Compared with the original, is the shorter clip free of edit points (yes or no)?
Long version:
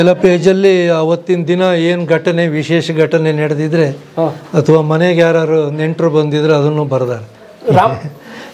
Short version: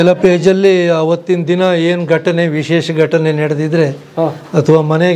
yes